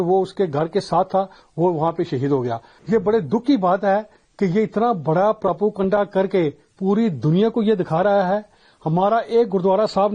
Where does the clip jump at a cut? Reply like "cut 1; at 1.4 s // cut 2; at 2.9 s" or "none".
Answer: cut 1; at 2.7 s